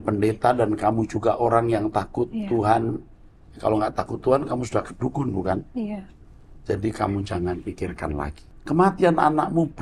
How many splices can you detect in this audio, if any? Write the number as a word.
one